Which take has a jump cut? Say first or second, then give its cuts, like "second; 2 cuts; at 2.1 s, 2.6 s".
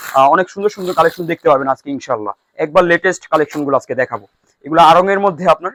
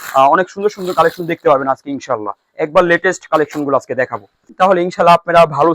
second; 1 cut; at 4.5 s